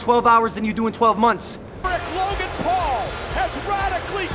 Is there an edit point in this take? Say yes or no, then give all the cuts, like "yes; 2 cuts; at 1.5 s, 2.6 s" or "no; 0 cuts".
yes; 1 cut; at 1.8 s